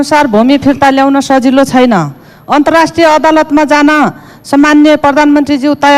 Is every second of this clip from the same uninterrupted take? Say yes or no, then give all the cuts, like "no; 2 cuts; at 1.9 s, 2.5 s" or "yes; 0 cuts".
yes; 0 cuts